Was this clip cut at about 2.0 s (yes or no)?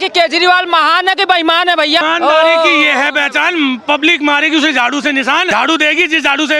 yes